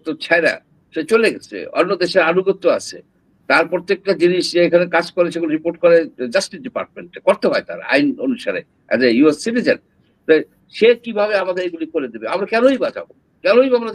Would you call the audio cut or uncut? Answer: uncut